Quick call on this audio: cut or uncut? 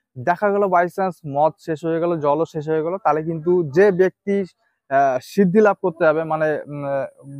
uncut